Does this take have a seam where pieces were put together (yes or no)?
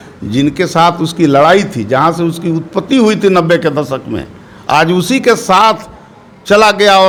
no